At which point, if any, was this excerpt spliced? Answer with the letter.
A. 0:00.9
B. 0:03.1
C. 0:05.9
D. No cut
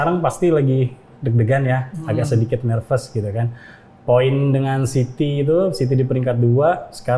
D